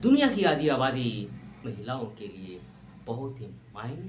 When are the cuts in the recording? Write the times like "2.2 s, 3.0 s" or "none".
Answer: none